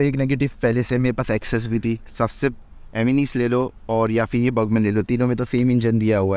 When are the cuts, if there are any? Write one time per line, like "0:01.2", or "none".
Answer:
0:02.7

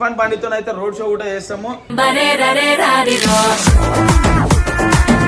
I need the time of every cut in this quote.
none

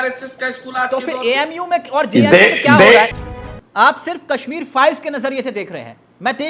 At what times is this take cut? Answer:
0:03.2

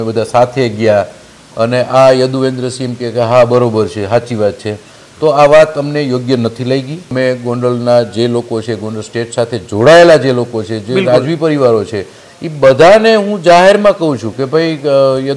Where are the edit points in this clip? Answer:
0:07.1

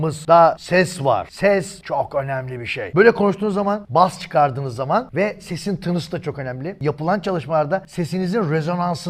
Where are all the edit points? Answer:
none

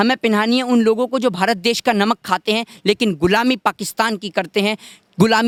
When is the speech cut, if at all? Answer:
none

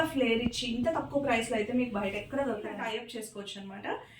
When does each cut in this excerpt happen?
0:02.7

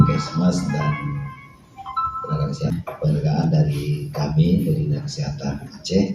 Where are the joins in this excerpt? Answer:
0:02.7

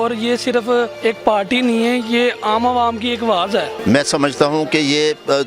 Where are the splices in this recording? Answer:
0:00.9
0:03.7

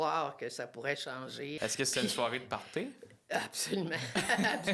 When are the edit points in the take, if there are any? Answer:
0:01.5

